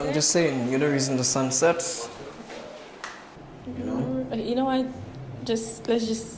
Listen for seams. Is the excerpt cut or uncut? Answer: uncut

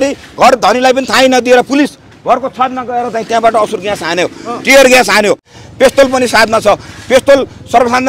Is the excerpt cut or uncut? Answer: cut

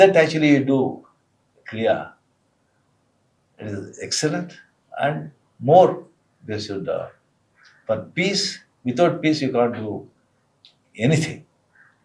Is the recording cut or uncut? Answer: uncut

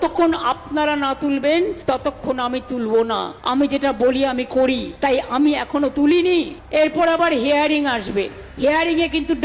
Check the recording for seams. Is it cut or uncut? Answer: cut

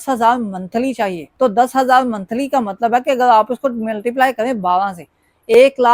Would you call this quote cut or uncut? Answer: uncut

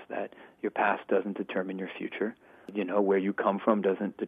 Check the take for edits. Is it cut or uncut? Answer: cut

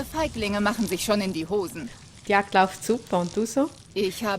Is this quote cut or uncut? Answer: cut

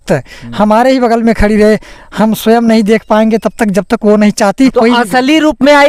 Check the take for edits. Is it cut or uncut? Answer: cut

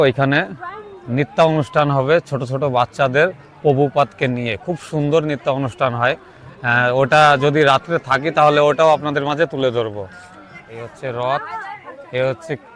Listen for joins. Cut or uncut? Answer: uncut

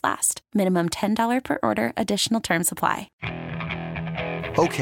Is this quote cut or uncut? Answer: cut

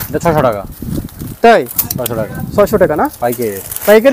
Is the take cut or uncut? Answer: uncut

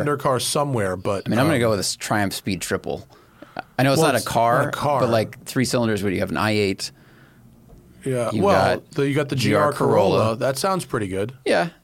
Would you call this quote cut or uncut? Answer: uncut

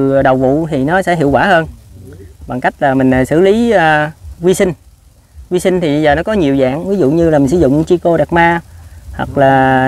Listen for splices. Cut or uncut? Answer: uncut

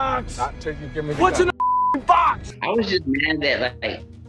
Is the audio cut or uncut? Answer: cut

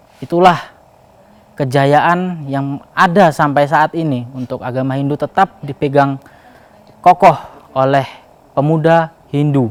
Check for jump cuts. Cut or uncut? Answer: uncut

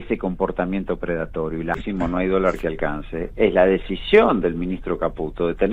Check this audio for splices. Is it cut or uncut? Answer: cut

